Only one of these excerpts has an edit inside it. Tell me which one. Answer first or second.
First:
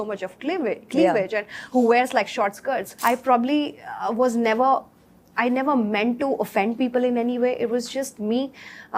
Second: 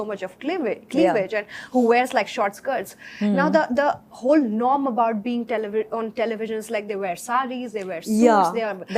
first